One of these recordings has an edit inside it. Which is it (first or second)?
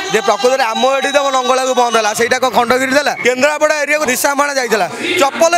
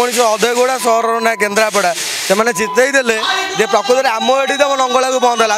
first